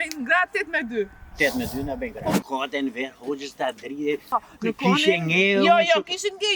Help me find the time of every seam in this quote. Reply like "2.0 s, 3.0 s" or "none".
2.4 s, 4.3 s

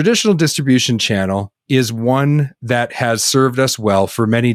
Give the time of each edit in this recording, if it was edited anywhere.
none

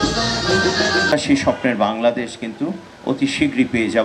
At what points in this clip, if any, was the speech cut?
1.1 s

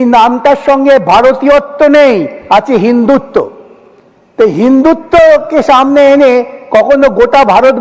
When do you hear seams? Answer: none

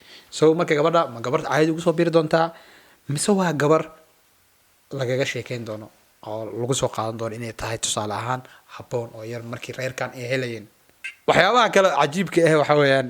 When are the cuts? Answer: 11.0 s

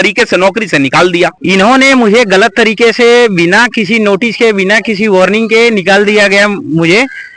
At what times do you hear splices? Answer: 1.4 s

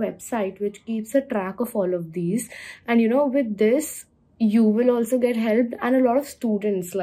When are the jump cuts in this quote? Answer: none

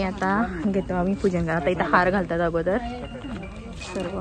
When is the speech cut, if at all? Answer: none

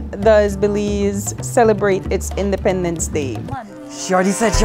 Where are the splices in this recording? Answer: none

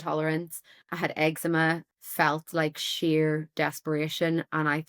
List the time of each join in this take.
1.9 s

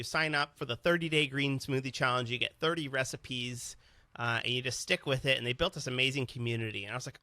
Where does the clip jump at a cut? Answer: none

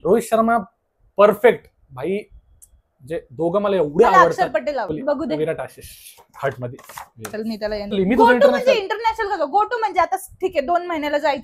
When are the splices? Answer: 4.9 s, 7.9 s

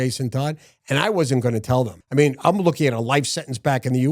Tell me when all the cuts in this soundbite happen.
2.0 s

